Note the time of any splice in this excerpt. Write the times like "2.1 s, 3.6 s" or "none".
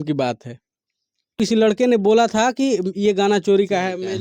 1.4 s